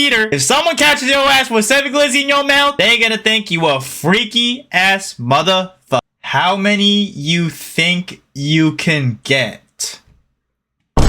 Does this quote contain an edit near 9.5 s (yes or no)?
no